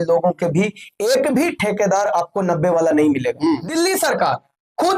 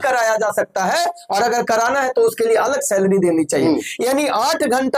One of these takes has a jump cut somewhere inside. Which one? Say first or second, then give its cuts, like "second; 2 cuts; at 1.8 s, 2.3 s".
first; 1 cut; at 3.7 s